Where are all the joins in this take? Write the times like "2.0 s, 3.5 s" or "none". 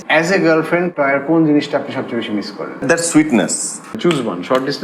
0.9 s, 2.8 s, 4.0 s